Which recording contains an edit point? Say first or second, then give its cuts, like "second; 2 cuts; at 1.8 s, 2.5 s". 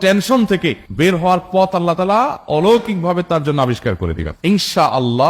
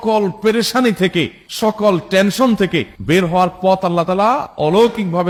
first; 1 cut; at 4.3 s